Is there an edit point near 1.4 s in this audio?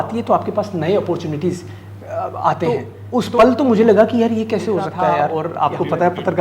no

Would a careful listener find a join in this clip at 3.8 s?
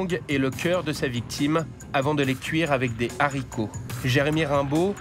yes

